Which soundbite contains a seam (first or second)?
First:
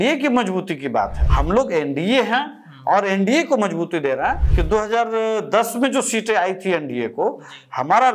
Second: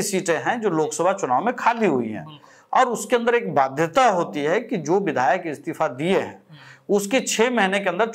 first